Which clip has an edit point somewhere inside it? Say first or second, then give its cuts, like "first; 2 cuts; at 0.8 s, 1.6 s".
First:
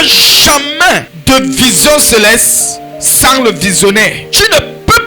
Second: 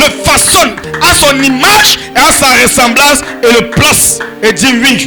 first; 2 cuts; at 1.1 s, 4.2 s